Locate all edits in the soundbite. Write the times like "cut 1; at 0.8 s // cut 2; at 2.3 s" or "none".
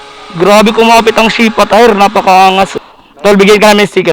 cut 1; at 2.7 s

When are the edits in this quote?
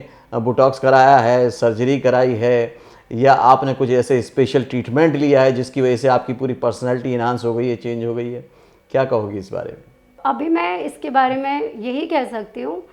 none

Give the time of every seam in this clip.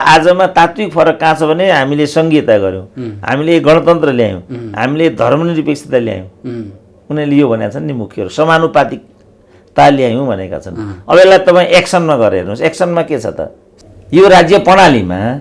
cut 1; at 13.6 s

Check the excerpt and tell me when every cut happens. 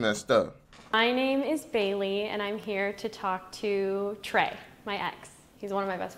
cut 1; at 0.9 s

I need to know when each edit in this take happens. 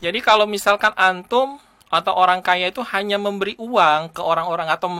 none

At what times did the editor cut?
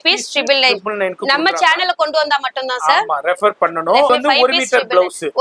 cut 1; at 4.1 s

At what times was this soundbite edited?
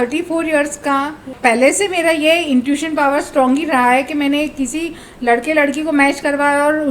cut 1; at 1.3 s

